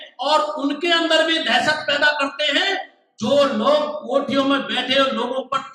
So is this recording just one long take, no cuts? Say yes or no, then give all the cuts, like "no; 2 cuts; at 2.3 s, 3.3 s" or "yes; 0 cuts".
yes; 0 cuts